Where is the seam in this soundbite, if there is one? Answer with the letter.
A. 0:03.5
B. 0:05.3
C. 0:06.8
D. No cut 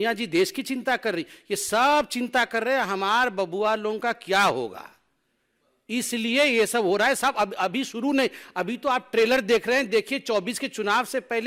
D